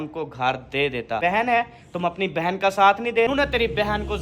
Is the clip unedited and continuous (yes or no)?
no